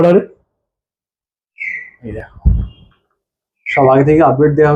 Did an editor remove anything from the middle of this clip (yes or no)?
yes